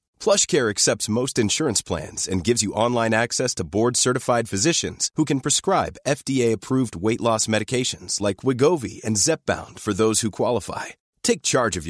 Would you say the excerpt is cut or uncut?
uncut